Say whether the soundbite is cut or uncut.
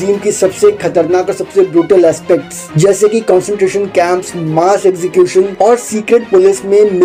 uncut